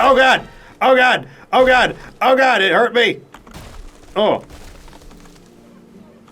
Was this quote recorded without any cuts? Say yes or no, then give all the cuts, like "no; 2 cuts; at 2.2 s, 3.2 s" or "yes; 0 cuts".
yes; 0 cuts